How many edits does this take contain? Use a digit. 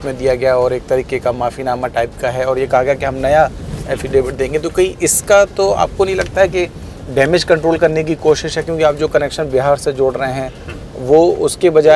0